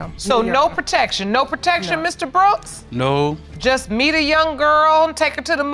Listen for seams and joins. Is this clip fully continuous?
yes; 0 cuts

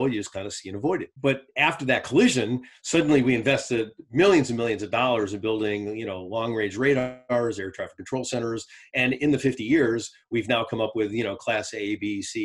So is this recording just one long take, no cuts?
no; 1 cut; at 1.1 s

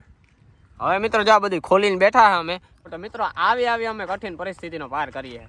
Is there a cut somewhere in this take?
yes; 1 cut; at 2.8 s

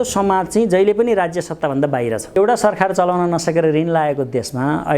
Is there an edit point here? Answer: yes; 1 cut; at 2.4 s

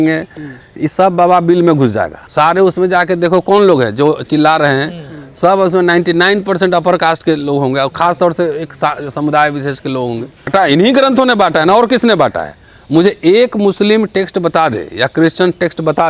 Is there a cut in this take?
yes; 2 cuts; at 2.2 s, 10.5 s

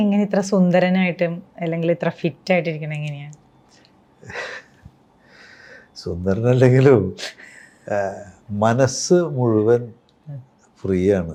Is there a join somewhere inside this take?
no; 0 cuts

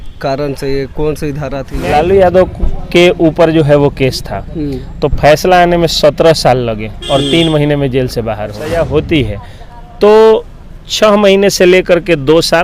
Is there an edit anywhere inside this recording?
yes; 2 cuts; at 1.7 s, 8.6 s

